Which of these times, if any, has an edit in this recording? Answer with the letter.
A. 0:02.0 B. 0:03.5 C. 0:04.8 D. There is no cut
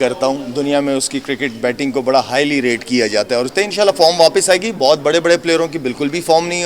B